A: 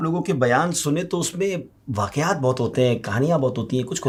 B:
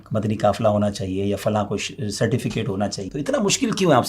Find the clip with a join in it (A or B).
B